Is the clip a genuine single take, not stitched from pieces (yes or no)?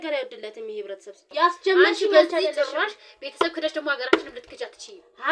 no